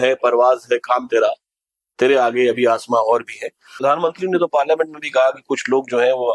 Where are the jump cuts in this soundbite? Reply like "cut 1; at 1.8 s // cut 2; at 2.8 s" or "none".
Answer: cut 1; at 3.7 s